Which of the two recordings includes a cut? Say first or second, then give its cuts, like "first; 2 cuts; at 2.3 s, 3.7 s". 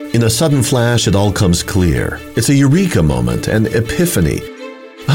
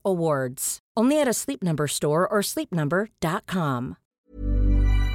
second; 1 cut; at 4.2 s